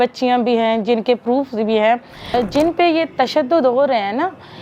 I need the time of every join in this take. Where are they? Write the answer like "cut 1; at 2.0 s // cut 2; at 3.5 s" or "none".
cut 1; at 2.1 s

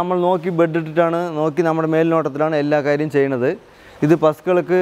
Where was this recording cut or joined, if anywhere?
none

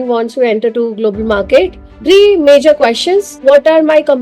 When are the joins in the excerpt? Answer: cut 1; at 1.9 s // cut 2; at 3.3 s

